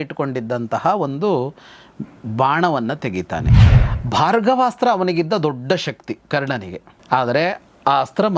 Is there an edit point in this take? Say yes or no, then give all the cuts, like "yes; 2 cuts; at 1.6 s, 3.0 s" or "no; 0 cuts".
yes; 1 cut; at 3.6 s